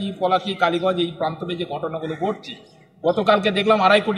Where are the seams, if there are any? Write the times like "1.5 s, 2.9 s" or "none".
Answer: none